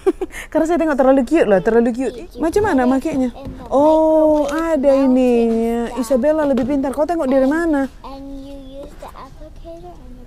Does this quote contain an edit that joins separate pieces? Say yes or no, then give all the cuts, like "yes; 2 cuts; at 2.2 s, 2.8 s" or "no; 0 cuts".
yes; 1 cut; at 2.0 s